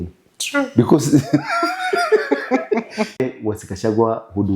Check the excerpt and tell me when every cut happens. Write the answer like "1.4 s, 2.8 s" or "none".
3.1 s

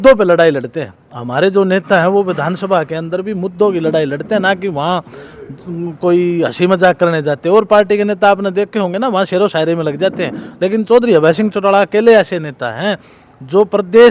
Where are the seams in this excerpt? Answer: none

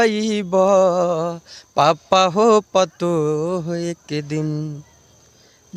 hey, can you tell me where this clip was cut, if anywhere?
none

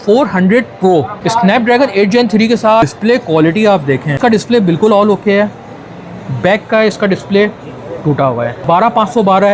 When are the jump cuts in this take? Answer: 1.2 s, 2.9 s, 4.2 s, 8.6 s

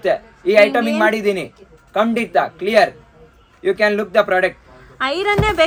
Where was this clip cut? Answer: none

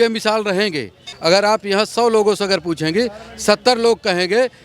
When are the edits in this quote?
1.0 s

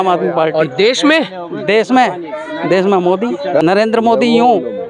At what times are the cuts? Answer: 3.6 s

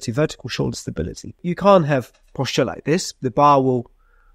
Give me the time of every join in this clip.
1.4 s

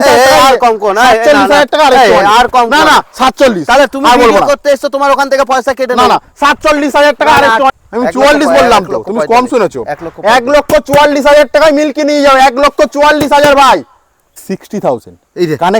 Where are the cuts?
7.7 s, 14.4 s

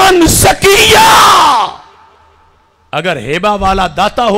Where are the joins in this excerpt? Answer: none

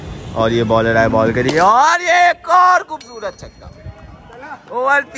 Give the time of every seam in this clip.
none

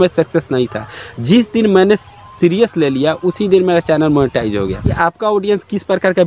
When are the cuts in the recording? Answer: 4.9 s

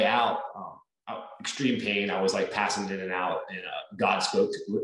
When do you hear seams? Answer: none

